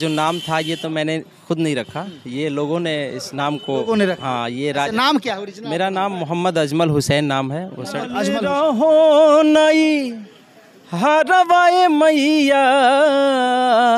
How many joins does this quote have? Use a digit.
1